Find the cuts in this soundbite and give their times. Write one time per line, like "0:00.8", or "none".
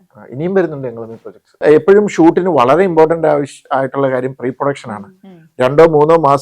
0:01.6